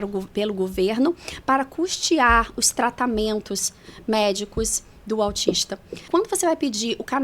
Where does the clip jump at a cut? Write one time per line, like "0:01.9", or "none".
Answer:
0:06.1